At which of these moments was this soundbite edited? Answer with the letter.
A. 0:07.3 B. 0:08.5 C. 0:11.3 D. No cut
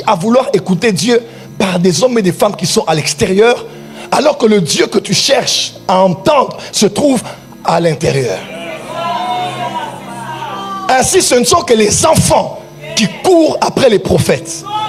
D